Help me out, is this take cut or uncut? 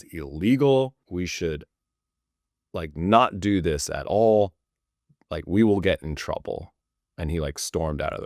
cut